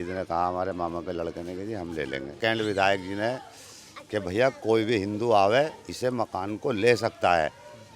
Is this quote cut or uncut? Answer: cut